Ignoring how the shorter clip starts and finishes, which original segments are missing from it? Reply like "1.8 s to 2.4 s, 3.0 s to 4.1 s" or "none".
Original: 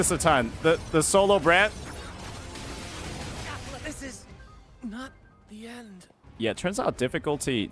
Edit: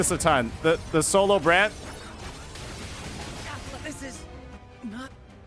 none